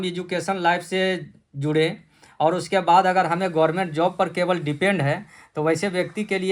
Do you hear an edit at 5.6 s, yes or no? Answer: no